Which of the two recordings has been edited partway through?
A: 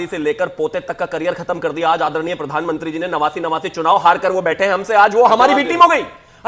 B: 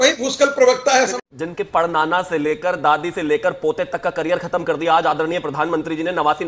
B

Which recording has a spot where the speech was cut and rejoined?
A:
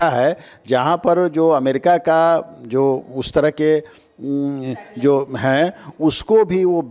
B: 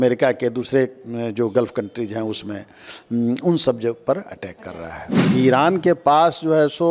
B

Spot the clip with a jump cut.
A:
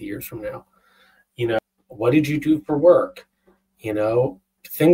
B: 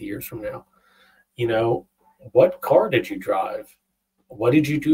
A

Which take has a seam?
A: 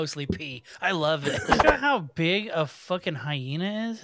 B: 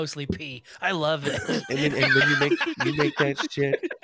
A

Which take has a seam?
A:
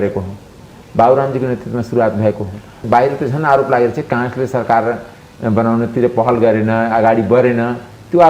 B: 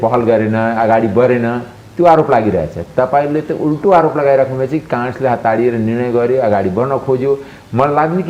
A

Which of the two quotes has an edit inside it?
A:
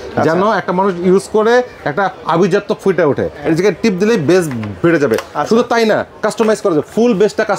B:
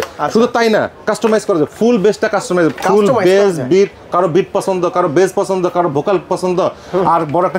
A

